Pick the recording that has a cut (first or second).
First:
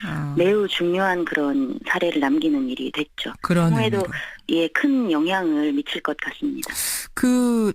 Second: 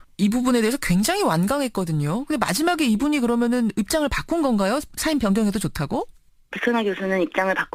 first